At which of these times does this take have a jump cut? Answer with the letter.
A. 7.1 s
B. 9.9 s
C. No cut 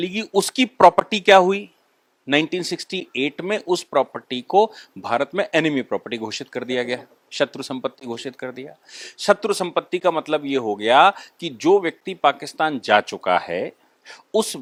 C